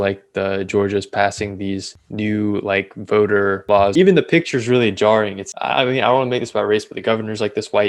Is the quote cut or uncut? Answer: cut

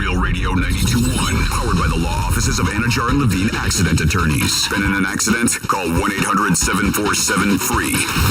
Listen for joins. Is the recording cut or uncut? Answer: uncut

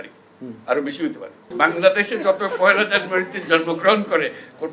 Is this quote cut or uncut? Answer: cut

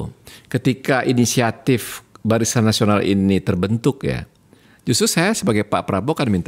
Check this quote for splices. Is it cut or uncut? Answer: uncut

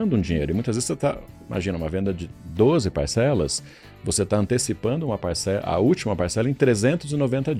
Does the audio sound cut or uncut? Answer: uncut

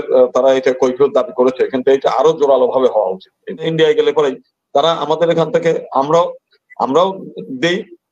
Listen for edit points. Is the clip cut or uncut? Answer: cut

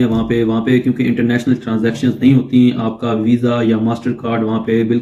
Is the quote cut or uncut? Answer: uncut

